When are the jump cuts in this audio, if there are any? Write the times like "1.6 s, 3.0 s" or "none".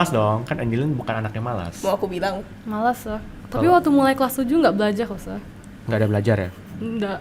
3.2 s